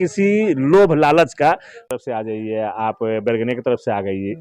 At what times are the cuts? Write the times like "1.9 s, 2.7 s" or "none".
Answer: 1.8 s